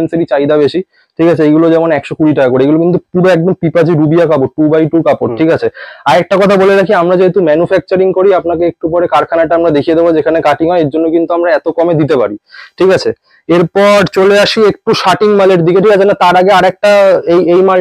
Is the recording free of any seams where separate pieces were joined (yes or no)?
yes